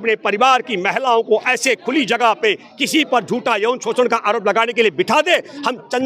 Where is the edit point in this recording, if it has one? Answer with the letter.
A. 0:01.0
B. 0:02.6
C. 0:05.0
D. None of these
D